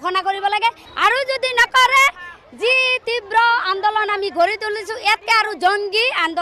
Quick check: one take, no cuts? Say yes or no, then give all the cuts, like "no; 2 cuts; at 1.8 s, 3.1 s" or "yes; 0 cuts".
yes; 0 cuts